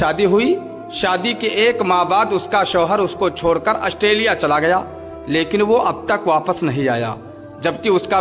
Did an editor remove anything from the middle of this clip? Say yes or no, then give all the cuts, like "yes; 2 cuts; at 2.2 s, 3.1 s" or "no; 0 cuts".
no; 0 cuts